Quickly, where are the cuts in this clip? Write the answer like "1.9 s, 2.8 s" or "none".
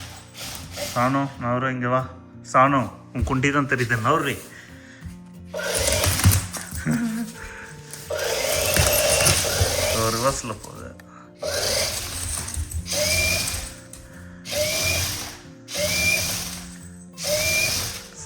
none